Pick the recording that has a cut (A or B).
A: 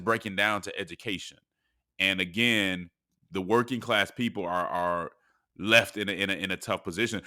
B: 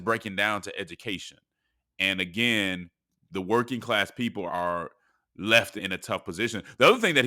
B